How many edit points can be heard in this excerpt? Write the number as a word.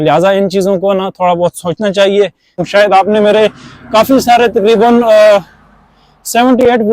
one